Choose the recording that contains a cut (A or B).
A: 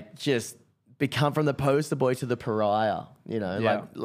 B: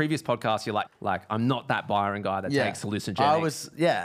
B